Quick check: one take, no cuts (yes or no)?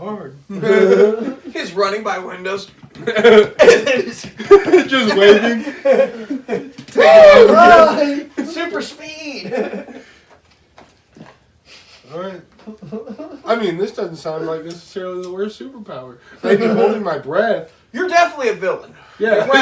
yes